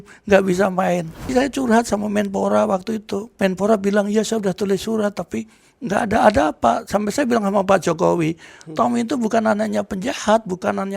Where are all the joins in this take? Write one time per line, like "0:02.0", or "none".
0:01.3
0:03.3